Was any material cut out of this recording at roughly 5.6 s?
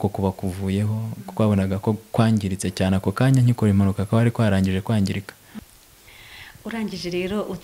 yes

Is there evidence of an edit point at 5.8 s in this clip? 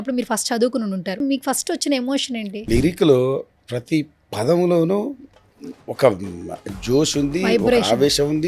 no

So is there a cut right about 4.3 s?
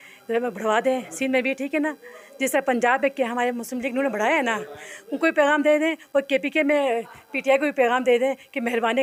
no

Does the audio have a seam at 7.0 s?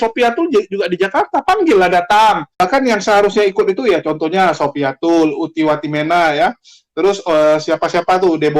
no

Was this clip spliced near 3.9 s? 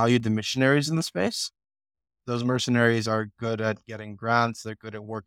no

